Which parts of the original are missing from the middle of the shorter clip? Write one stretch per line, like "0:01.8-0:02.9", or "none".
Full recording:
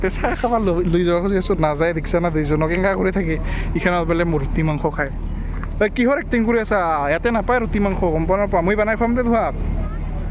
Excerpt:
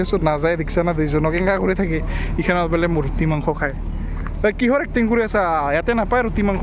none